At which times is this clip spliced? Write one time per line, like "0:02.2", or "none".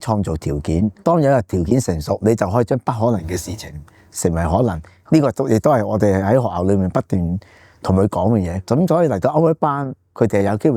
0:00.9
0:08.7